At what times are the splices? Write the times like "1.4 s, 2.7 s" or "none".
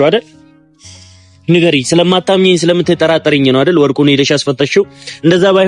none